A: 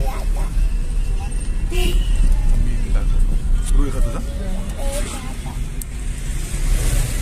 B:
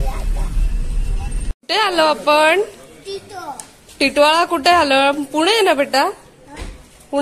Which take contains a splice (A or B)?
B